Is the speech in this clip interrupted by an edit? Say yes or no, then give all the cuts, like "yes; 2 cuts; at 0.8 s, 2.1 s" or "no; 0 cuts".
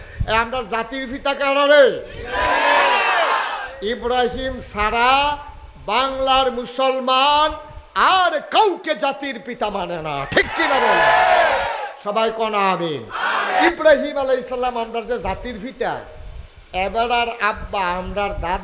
yes; 1 cut; at 13.6 s